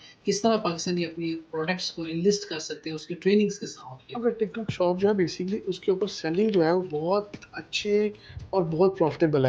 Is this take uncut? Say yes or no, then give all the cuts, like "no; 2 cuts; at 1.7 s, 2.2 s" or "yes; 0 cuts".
no; 1 cut; at 4.2 s